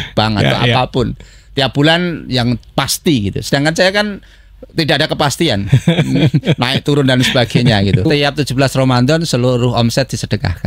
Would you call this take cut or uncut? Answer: cut